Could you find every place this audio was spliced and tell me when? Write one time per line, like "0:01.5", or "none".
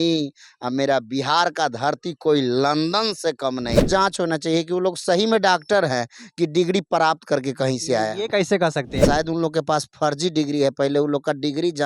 0:03.9
0:09.0